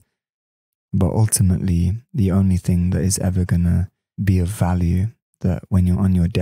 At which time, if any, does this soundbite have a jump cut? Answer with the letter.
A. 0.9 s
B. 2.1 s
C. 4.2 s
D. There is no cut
C